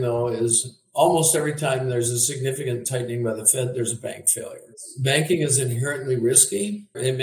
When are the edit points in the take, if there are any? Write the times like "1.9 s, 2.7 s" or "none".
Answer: none